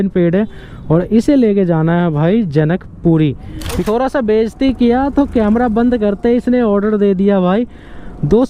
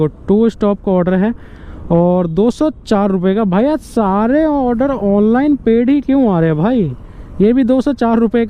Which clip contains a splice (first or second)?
first